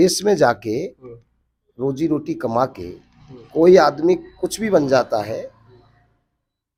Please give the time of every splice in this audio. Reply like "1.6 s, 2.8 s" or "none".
none